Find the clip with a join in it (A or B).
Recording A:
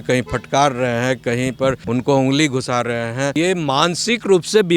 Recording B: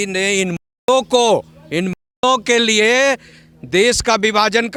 A